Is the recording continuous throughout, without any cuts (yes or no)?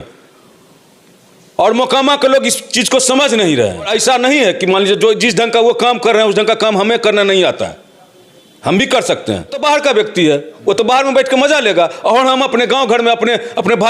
no